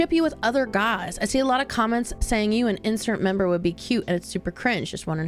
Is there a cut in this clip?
no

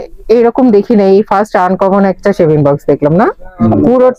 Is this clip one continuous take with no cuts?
yes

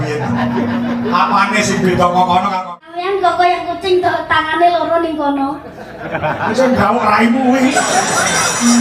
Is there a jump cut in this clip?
yes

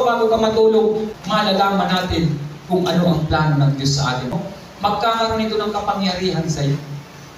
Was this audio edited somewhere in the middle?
yes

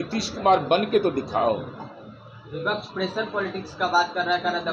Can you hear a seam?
no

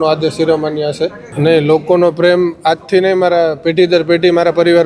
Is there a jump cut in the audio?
yes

